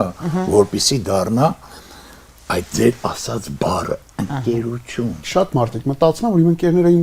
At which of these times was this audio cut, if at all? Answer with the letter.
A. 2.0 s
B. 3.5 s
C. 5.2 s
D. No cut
C